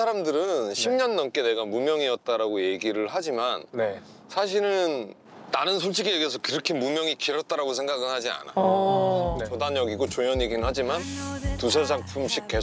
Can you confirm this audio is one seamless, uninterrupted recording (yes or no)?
no